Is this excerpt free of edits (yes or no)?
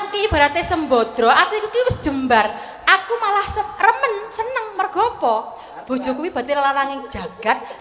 yes